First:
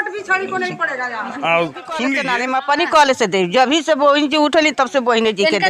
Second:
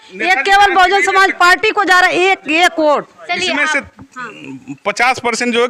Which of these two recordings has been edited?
first; 1 cut; at 2.2 s

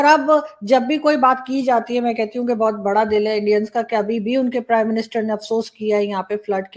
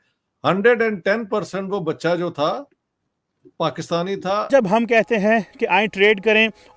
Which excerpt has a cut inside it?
second; 1 cut; at 4.5 s

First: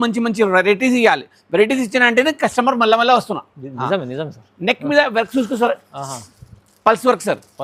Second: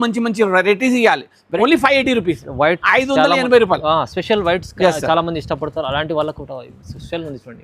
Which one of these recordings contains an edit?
second; 1 cut; at 1.5 s

